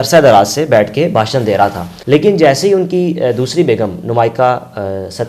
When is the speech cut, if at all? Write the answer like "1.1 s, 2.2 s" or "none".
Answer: 1.9 s